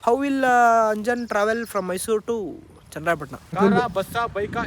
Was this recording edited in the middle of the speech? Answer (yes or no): yes